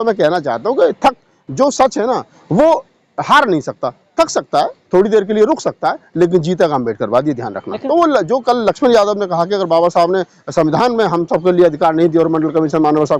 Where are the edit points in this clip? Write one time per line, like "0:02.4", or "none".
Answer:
0:07.7